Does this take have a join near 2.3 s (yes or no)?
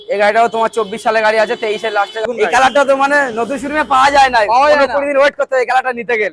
yes